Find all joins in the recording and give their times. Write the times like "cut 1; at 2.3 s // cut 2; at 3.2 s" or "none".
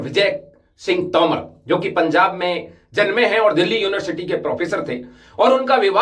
none